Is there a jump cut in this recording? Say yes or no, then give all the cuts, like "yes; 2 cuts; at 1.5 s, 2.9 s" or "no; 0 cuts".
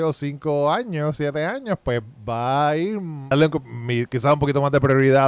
yes; 1 cut; at 3.3 s